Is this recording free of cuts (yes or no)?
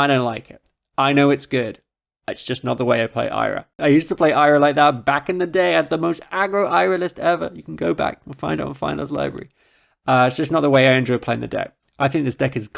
no